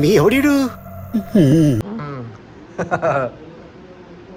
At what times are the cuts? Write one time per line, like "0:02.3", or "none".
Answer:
none

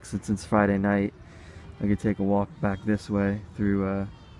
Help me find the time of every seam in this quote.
0:01.8

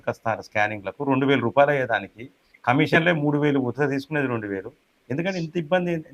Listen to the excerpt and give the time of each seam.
none

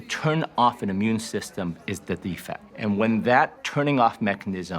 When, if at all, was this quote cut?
0:02.7

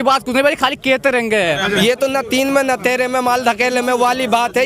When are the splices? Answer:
0:01.7

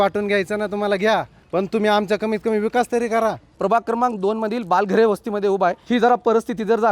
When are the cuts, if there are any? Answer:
0:01.4
0:03.5
0:05.8

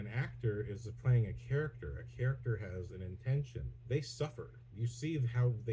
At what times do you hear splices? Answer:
0:03.7

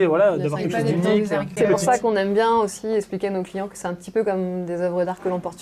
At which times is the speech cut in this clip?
0:01.6

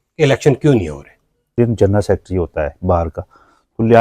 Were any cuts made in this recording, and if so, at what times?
0:01.6

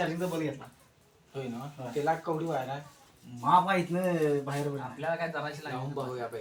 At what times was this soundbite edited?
none

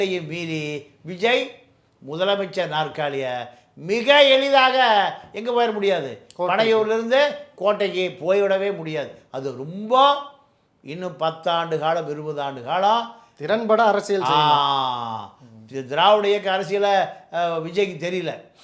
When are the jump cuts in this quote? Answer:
none

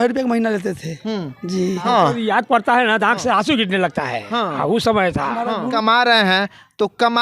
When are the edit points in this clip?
0:01.8
0:05.7

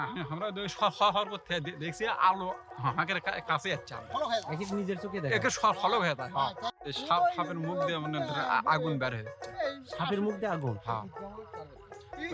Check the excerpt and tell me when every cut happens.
0:06.6

